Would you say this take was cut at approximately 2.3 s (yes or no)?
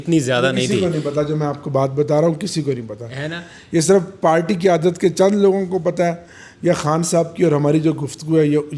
no